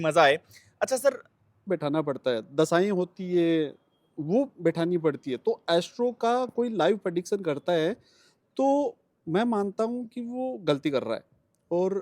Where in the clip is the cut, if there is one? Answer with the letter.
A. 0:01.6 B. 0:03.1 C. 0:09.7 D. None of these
A